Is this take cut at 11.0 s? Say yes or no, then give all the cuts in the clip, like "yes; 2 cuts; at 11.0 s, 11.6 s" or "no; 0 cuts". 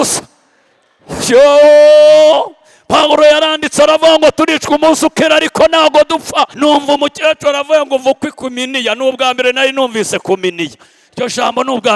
no; 1 cut; at 6.4 s